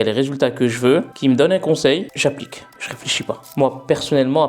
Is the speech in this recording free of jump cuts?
no; 1 cut; at 3.5 s

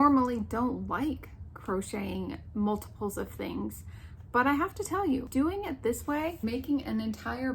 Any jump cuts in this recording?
yes; 2 cuts; at 5.3 s, 6.4 s

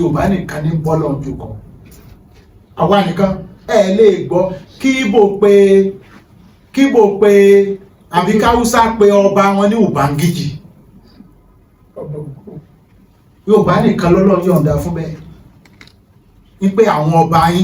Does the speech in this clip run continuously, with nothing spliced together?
yes; 0 cuts

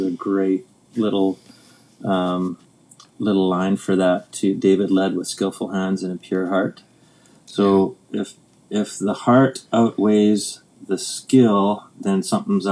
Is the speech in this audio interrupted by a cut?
no; 0 cuts

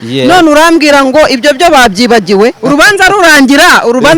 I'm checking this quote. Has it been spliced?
yes; 1 cut; at 2.6 s

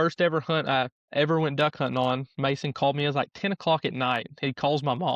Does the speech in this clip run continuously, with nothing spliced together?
no; 1 cut; at 1.0 s

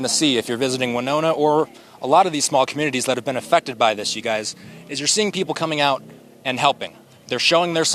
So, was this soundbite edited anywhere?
no; 0 cuts

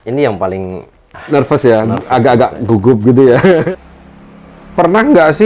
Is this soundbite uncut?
no; 1 cut; at 3.6 s

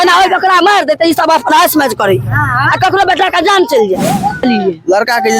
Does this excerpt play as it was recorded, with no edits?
no; 1 cut; at 4.4 s

